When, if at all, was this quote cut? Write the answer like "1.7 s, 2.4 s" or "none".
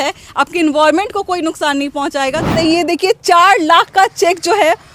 2.5 s